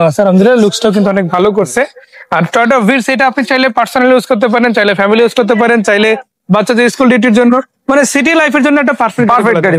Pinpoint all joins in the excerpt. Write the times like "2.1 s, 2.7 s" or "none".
none